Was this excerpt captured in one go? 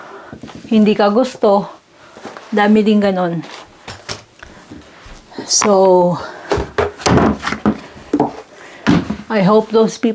yes; 0 cuts

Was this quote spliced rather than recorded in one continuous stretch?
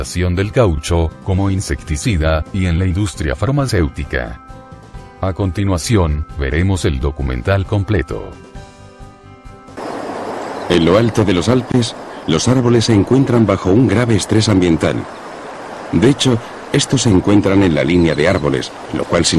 yes; 1 cut; at 9.6 s

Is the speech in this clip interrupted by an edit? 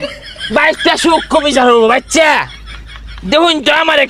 no; 0 cuts

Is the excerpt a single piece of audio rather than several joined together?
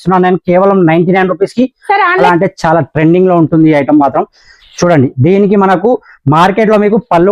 no; 1 cut; at 2.2 s

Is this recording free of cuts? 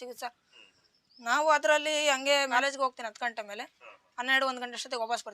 no; 1 cut; at 2.5 s

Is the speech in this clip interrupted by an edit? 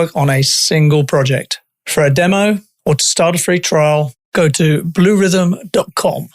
yes; 1 cut; at 2.7 s

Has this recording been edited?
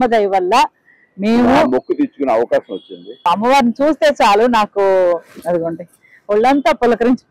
yes; 1 cut; at 3.3 s

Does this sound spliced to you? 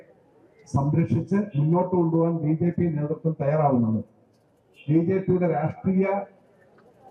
no; 0 cuts

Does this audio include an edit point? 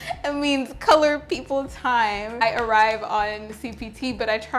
no; 0 cuts

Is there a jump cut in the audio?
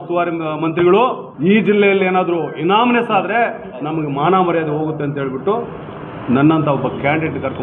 yes; 1 cut; at 1.3 s

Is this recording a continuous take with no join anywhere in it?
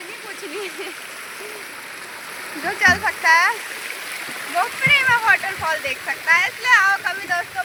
yes; 0 cuts

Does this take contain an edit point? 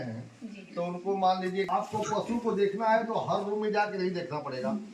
yes; 1 cut; at 1.7 s

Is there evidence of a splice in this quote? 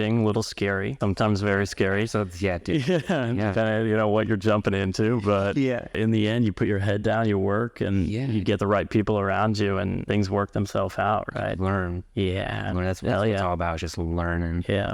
yes; 3 cuts; at 1.0 s, 6.0 s, 10.0 s

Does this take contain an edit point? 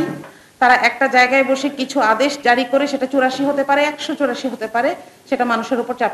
no; 0 cuts

